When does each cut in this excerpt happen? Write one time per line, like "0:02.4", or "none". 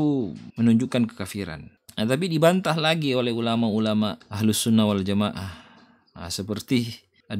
none